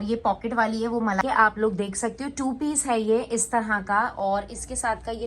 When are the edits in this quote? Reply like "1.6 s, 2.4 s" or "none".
1.2 s